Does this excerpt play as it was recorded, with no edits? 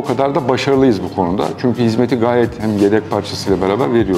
yes; 0 cuts

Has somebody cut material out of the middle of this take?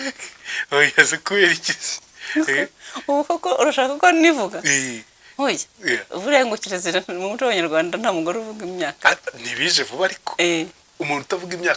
no; 0 cuts

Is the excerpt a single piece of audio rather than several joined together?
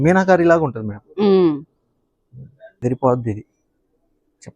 no; 1 cut; at 2.8 s

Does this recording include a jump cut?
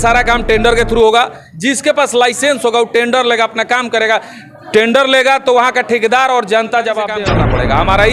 yes; 1 cut; at 7.2 s

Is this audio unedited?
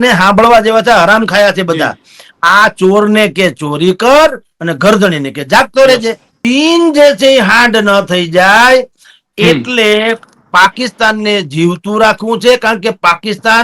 no; 1 cut; at 6.3 s

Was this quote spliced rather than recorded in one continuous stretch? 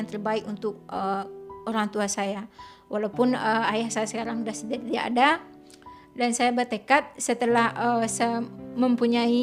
no; 0 cuts

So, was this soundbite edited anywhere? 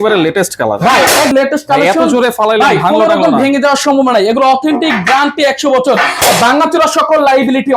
yes; 1 cut; at 1.3 s

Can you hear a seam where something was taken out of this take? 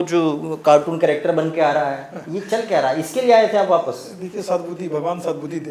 no; 0 cuts

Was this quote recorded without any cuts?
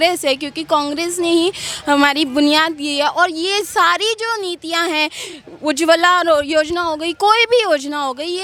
yes; 0 cuts

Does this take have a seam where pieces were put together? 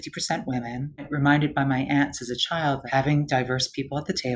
yes; 2 cuts; at 1.1 s, 2.8 s

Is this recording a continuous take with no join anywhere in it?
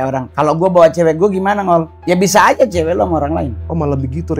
no; 2 cuts; at 1.9 s, 3.6 s

